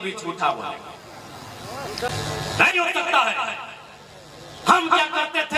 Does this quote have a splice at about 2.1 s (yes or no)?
yes